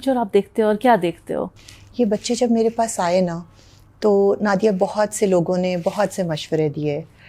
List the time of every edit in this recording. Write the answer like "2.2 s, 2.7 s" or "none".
none